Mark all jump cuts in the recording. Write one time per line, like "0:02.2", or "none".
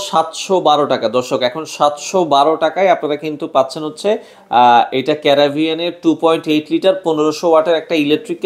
none